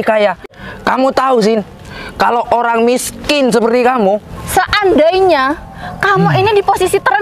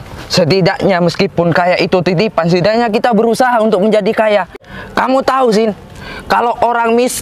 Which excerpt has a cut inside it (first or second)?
first